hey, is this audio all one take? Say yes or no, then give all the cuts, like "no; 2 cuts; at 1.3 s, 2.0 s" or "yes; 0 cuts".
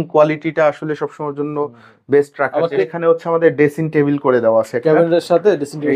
no; 1 cut; at 2.8 s